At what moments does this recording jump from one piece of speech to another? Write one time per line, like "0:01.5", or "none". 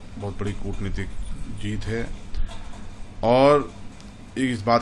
none